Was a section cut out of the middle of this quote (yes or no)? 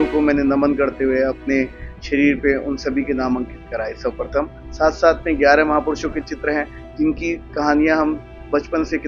no